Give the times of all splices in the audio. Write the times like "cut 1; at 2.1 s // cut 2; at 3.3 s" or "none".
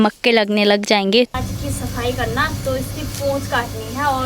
cut 1; at 1.3 s